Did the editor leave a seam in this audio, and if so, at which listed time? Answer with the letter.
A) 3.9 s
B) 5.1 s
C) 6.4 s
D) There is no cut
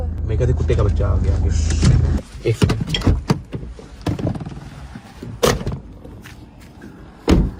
D